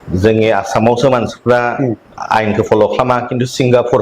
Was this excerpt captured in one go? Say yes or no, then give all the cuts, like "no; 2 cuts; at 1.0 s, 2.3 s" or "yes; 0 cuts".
no; 1 cut; at 0.9 s